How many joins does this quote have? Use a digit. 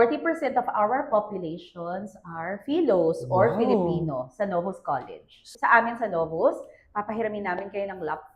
1